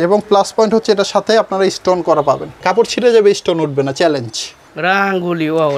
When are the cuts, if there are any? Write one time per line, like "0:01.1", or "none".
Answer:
0:02.6
0:04.6